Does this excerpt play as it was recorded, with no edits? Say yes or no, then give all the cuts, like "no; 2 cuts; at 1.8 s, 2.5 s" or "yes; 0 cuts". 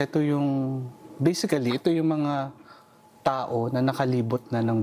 yes; 0 cuts